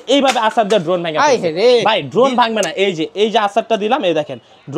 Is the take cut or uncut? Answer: uncut